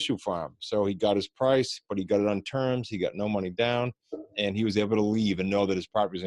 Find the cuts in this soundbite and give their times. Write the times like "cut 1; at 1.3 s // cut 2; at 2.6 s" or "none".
none

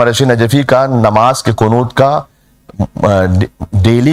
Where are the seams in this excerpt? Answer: none

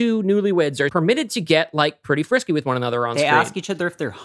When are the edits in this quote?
cut 1; at 0.9 s

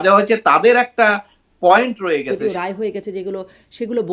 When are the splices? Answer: cut 1; at 2.3 s

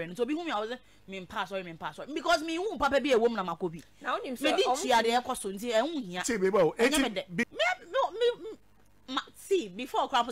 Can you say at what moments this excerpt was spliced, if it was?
cut 1; at 7.5 s

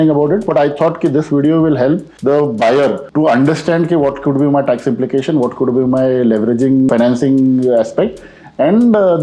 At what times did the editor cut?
cut 1; at 2.1 s // cut 2; at 3.0 s // cut 3; at 6.9 s

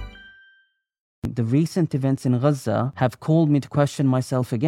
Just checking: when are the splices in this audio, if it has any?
cut 1; at 1.3 s // cut 2; at 2.9 s

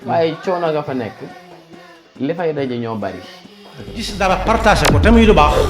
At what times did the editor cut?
cut 1; at 4.2 s

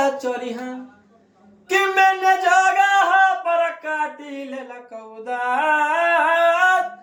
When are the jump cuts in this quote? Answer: none

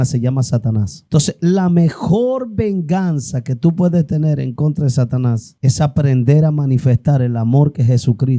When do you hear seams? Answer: cut 1; at 1.0 s // cut 2; at 5.5 s

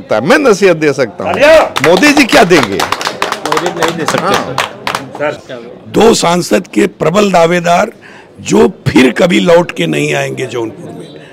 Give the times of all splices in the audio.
none

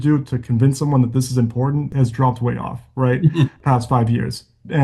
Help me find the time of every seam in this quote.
cut 1; at 1.9 s // cut 2; at 3.6 s

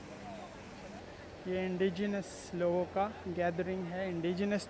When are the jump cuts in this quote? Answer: cut 1; at 1.0 s

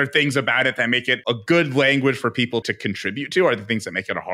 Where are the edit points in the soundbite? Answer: cut 1; at 1.3 s // cut 2; at 2.6 s

